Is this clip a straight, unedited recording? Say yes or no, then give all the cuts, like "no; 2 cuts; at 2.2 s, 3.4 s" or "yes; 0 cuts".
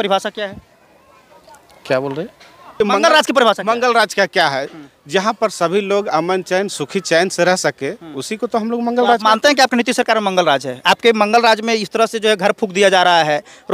no; 1 cut; at 2.7 s